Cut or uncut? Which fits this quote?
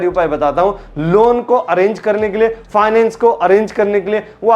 uncut